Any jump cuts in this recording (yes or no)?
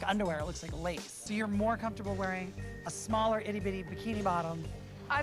yes